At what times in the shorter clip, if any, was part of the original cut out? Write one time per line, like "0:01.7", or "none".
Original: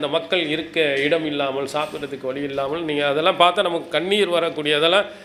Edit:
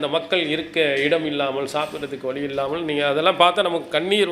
none